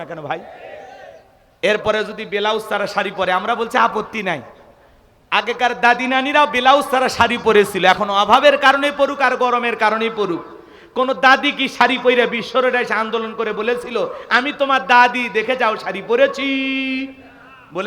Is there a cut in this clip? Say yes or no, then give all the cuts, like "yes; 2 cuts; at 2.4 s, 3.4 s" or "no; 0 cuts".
no; 0 cuts